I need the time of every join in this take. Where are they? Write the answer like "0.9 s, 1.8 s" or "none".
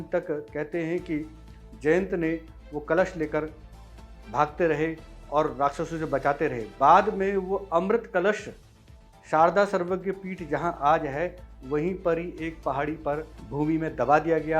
13.4 s